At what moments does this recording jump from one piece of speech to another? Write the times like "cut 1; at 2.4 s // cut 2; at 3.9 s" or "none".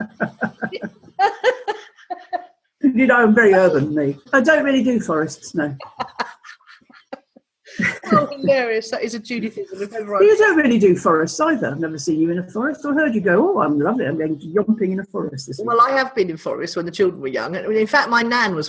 cut 1; at 4.3 s